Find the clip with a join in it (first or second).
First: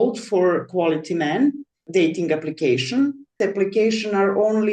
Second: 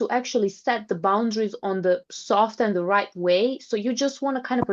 first